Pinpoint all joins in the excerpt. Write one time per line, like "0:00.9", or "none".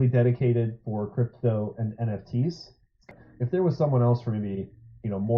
0:03.1